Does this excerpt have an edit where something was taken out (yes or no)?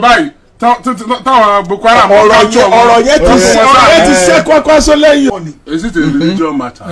yes